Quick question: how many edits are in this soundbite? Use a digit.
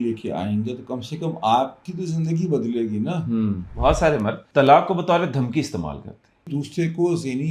3